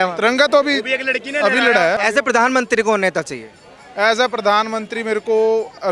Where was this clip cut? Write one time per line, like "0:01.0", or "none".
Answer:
0:02.0